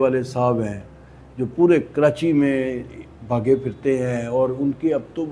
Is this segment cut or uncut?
uncut